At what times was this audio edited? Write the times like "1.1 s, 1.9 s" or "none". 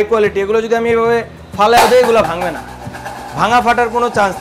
none